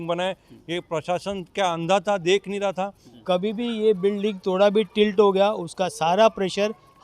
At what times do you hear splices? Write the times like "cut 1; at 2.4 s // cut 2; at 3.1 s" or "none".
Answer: cut 1; at 3.1 s